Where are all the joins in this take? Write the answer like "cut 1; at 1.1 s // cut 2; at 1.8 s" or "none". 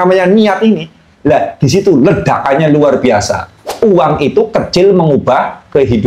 cut 1; at 3.7 s